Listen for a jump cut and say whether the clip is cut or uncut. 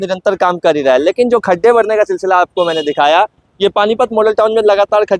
uncut